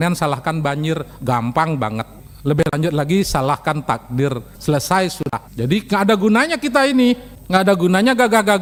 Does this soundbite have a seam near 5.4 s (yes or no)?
no